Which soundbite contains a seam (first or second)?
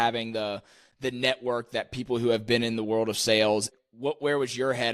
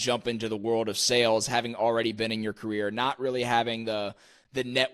first